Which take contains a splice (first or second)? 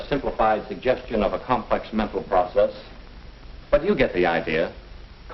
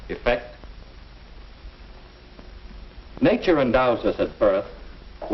first